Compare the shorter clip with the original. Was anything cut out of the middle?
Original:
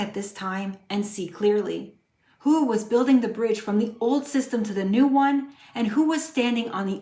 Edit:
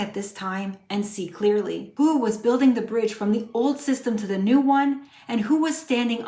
yes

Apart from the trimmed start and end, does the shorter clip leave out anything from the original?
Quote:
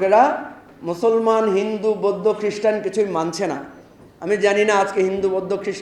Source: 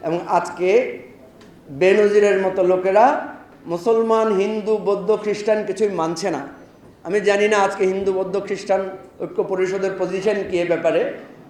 no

